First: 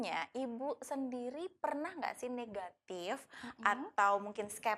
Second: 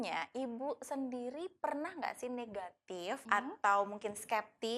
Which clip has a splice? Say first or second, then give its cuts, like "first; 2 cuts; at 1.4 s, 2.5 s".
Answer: second; 1 cut; at 3.2 s